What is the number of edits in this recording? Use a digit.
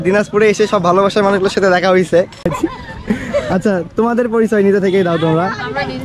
1